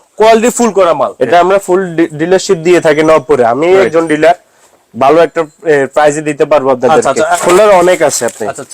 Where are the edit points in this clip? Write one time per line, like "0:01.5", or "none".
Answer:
0:01.1
0:07.3